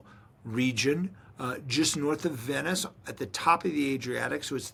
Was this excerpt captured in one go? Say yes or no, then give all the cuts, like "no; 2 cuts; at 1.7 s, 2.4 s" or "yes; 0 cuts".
yes; 0 cuts